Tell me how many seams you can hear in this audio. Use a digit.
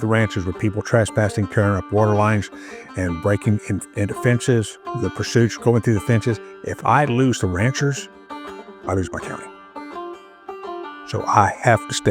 0